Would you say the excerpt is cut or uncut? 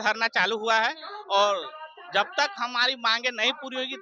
uncut